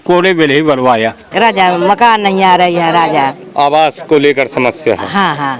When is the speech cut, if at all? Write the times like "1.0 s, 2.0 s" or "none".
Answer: 1.2 s